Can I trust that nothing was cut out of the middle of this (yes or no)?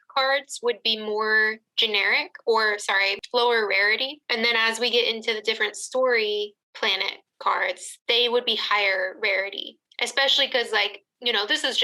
yes